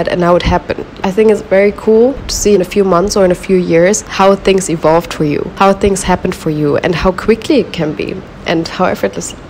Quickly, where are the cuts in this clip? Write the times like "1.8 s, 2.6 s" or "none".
1.0 s, 2.4 s, 4.1 s, 5.5 s